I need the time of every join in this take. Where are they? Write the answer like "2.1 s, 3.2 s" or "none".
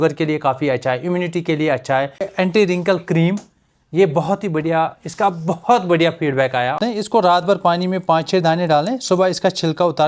2.3 s, 6.8 s